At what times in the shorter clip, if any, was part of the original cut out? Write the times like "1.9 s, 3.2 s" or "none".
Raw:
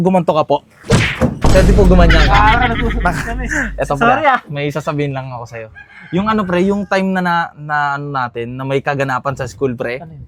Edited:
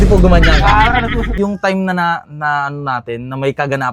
1.4 s

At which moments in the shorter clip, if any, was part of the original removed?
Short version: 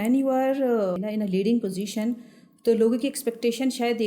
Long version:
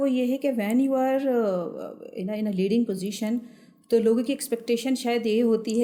1.0 s

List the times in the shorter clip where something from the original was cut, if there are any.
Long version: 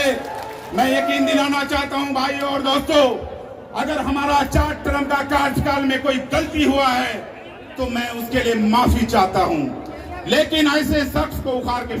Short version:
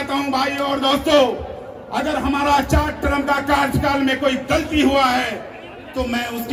none

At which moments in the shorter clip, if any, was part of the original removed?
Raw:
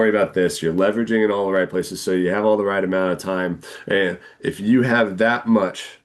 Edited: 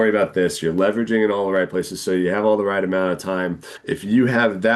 3.7 s

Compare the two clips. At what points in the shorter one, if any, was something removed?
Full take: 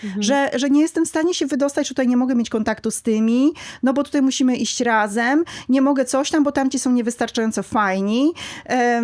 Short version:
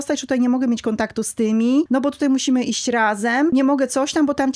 1.9 s, 3.5 s

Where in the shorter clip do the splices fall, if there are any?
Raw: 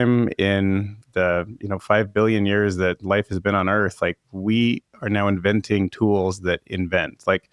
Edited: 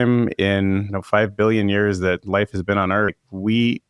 0.9 s, 3.2 s

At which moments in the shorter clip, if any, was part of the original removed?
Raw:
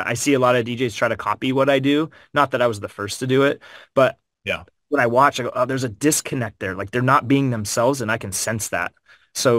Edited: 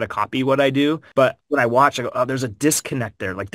1.1 s

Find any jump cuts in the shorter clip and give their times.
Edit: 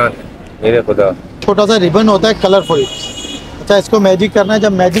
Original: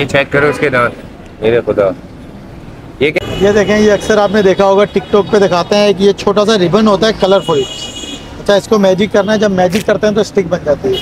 1.4 s

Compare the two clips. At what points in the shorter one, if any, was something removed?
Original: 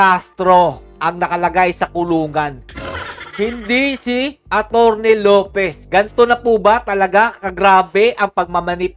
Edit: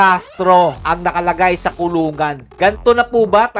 0.8 s, 2.5 s

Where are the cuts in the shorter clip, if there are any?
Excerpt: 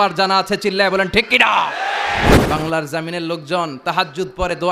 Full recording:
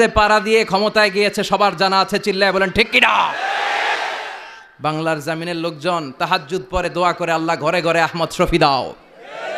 2.3 s

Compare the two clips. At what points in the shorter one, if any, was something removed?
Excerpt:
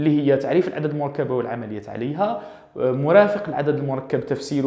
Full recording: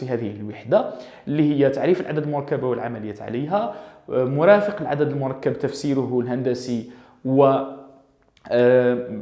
none

